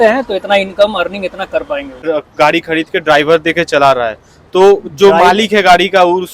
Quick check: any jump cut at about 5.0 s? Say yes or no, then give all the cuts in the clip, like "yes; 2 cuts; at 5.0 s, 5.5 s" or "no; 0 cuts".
no; 1 cut; at 2.0 s